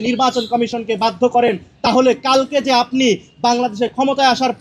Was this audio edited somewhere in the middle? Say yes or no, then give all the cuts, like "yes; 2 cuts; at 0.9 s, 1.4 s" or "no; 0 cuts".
no; 0 cuts